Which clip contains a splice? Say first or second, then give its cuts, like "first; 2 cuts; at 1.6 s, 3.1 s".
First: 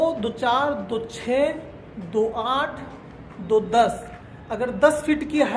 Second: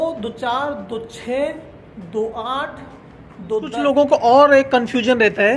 second; 1 cut; at 3.7 s